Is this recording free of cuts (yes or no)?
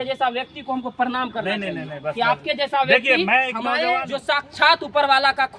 no